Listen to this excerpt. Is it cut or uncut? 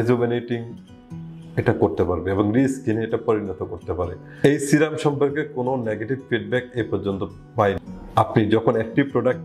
cut